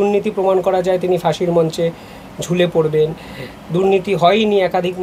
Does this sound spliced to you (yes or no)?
no